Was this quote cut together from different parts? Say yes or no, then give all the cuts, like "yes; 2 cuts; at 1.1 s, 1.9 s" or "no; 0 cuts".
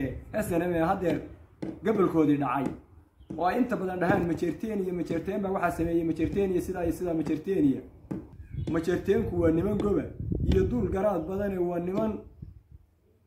yes; 1 cut; at 8.4 s